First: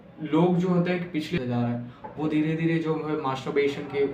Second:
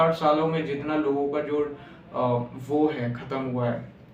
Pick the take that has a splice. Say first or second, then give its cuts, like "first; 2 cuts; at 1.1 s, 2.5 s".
first; 1 cut; at 1.4 s